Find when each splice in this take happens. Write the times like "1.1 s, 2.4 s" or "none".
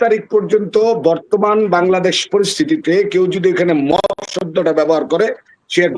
none